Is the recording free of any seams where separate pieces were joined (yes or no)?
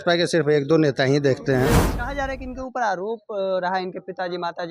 no